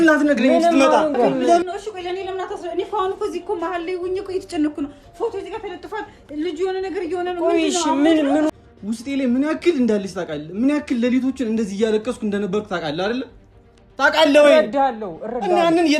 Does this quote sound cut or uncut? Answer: cut